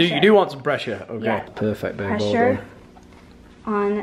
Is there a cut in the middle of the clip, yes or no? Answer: yes